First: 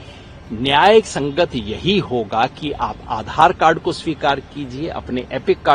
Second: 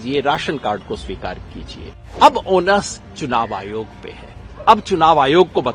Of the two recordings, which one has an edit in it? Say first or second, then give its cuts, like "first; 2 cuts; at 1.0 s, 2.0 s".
second; 1 cut; at 2.0 s